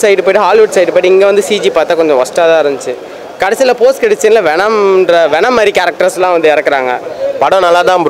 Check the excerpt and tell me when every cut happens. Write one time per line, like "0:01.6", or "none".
0:07.1